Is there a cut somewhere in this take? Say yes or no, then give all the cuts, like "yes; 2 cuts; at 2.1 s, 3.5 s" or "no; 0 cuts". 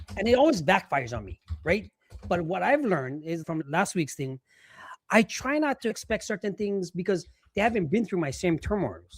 yes; 2 cuts; at 3.5 s, 6.0 s